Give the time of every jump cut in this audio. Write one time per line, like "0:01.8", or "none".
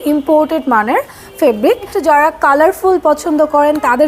0:01.9